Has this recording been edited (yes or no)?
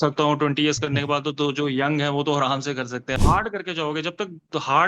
yes